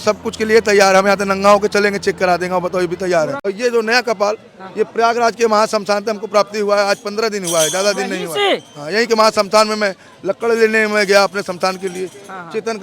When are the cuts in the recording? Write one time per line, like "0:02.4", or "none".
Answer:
0:03.4